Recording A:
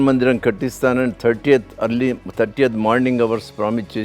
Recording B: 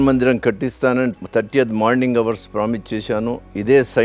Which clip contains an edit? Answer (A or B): B